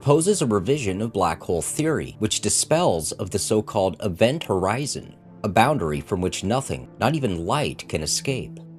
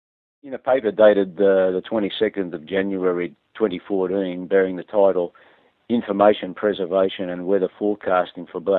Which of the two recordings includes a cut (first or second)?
second